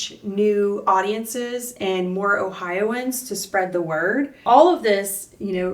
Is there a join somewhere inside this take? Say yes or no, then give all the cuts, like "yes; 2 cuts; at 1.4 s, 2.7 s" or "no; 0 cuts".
yes; 1 cut; at 4.4 s